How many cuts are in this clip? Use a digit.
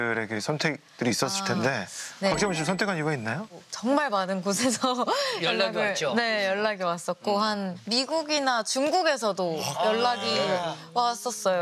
1